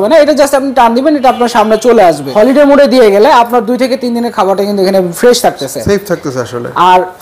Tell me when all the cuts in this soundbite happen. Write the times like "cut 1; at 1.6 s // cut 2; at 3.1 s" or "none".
cut 1; at 2.2 s